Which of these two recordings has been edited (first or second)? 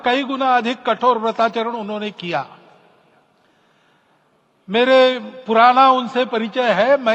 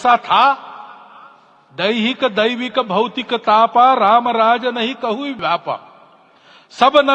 second